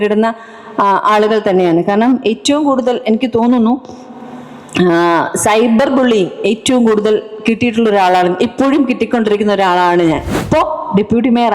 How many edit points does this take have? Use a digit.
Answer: 1